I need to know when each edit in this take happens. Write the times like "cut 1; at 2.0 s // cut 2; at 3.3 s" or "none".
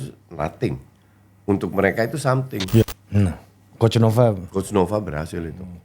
cut 1; at 2.8 s